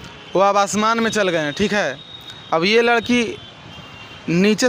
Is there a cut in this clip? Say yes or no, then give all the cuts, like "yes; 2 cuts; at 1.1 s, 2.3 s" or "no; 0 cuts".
no; 0 cuts